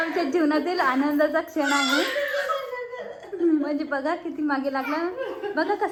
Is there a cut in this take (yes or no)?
no